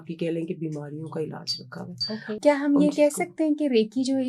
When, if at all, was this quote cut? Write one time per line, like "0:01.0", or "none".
0:02.4